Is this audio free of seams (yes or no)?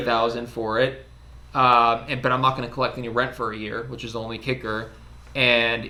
yes